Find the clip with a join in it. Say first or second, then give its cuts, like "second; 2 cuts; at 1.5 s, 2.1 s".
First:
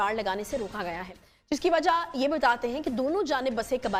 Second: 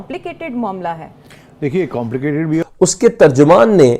second; 1 cut; at 2.7 s